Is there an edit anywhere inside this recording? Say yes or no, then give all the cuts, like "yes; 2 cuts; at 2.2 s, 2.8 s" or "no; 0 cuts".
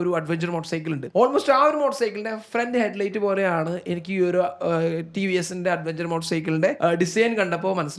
no; 0 cuts